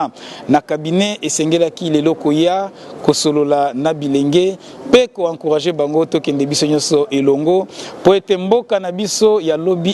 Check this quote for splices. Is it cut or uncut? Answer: uncut